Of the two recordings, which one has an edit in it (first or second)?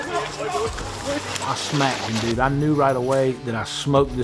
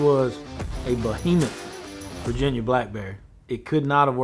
first